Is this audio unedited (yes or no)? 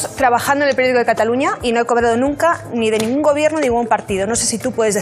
yes